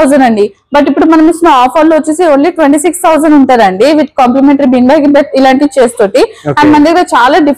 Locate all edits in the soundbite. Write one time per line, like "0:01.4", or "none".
none